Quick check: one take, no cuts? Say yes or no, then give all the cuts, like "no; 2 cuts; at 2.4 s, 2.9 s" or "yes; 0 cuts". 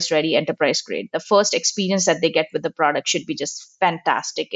yes; 0 cuts